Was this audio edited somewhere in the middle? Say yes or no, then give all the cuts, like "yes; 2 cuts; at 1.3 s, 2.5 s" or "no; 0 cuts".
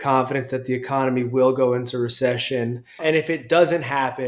yes; 1 cut; at 2.8 s